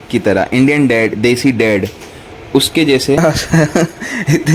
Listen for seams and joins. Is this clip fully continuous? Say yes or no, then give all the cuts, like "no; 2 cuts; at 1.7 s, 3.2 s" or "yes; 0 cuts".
no; 1 cut; at 3.2 s